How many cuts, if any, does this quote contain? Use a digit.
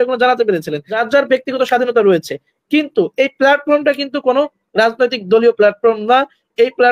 1